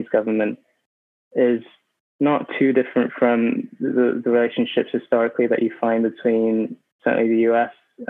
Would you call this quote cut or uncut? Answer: uncut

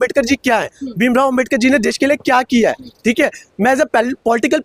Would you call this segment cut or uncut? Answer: uncut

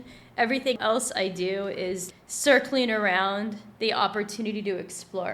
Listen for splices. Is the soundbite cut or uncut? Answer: cut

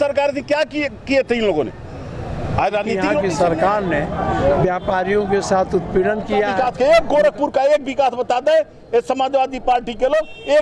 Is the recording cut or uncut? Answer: cut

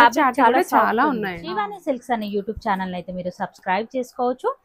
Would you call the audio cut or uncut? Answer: cut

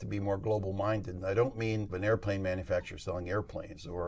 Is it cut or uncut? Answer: cut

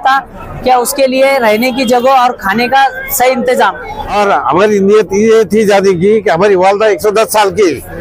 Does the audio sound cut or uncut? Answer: cut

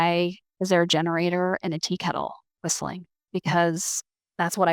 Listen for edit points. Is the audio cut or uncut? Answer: cut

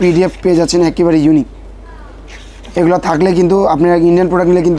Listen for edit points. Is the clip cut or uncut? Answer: uncut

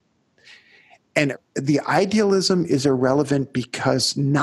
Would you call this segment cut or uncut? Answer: cut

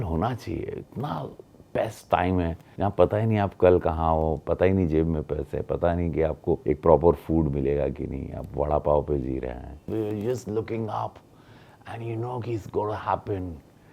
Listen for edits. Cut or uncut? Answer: cut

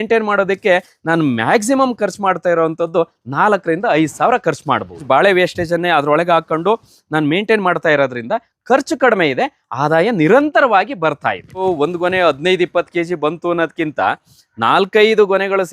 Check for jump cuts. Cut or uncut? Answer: cut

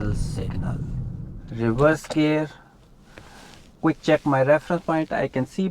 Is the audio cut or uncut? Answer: cut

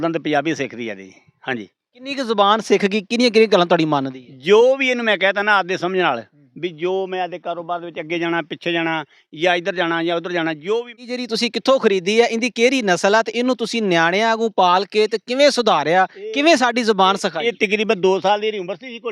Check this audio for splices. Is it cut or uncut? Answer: cut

